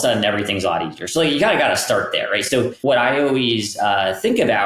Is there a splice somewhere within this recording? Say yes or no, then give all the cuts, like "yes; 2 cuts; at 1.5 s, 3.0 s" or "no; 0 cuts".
yes; 1 cut; at 2.8 s